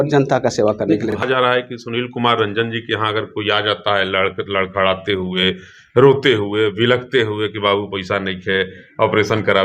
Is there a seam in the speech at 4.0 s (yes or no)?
no